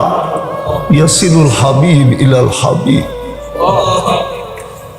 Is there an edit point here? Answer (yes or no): no